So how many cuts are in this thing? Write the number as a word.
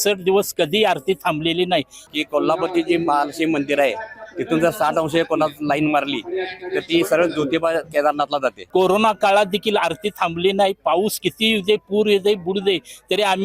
two